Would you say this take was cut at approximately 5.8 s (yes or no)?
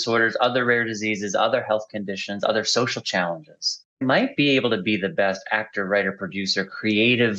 no